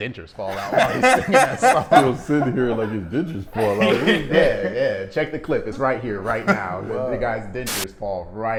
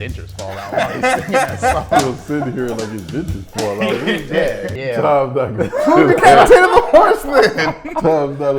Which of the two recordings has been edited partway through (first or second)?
second